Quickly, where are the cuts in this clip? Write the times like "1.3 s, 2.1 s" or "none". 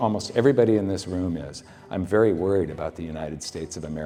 none